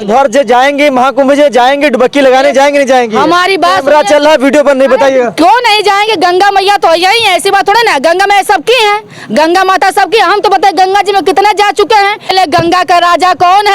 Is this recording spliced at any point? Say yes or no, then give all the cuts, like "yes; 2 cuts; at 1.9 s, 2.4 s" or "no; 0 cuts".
yes; 1 cut; at 12.3 s